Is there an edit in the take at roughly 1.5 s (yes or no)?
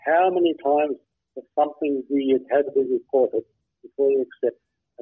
no